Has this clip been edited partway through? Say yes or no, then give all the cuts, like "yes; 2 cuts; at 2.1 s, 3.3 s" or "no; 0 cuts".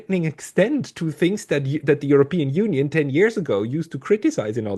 no; 0 cuts